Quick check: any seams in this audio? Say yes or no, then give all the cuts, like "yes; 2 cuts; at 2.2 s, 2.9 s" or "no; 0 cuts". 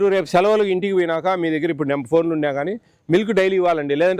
no; 0 cuts